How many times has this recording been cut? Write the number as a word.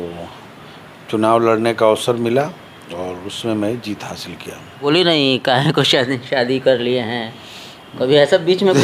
one